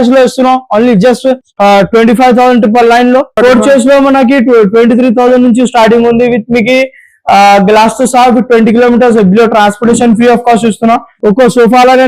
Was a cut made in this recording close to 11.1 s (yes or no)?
yes